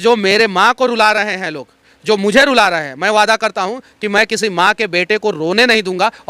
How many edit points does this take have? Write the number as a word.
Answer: zero